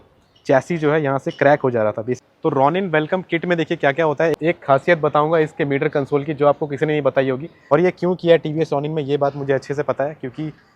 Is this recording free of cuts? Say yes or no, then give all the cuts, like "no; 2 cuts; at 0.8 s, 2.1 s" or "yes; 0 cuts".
no; 3 cuts; at 2.2 s, 4.4 s, 7.6 s